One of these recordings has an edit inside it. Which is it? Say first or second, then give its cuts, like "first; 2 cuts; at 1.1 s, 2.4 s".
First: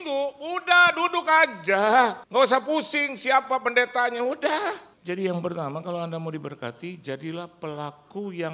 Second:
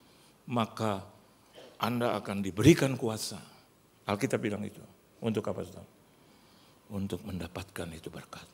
first; 2 cuts; at 2.2 s, 4.9 s